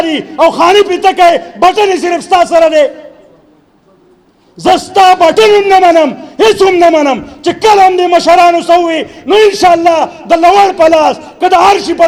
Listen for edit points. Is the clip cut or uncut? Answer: uncut